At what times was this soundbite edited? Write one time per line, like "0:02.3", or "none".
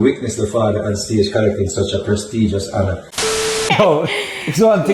0:03.5